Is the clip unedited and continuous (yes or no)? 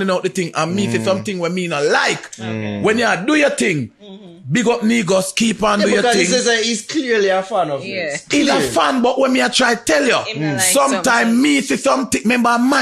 yes